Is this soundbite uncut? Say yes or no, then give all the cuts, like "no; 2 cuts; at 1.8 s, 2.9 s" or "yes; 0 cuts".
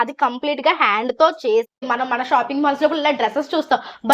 no; 1 cut; at 1.9 s